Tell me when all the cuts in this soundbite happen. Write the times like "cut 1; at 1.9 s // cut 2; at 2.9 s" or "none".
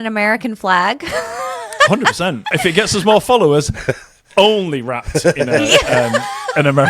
cut 1; at 2.4 s